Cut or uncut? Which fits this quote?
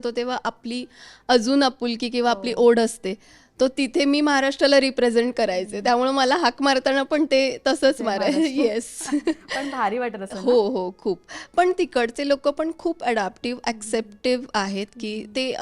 uncut